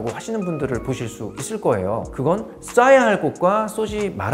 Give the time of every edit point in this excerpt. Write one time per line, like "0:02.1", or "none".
none